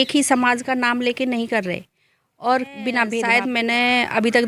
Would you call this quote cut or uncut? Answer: cut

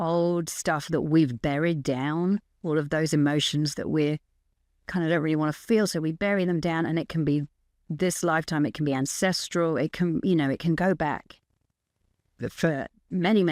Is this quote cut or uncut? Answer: uncut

